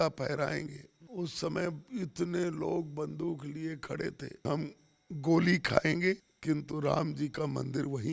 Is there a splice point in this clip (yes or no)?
yes